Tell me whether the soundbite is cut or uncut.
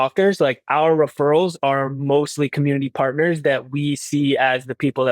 uncut